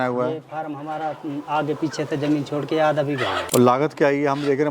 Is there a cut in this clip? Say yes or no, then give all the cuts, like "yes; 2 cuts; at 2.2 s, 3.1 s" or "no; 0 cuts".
yes; 1 cut; at 3.4 s